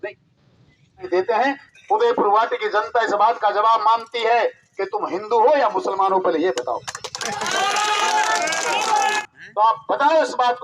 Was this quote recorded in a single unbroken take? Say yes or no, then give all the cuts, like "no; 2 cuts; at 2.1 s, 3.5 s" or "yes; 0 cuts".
no; 2 cuts; at 1.1 s, 9.2 s